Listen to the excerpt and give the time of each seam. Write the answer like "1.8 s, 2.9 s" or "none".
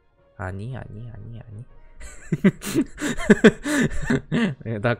4.1 s